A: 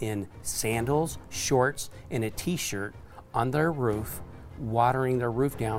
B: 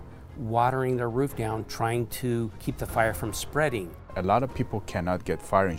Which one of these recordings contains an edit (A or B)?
B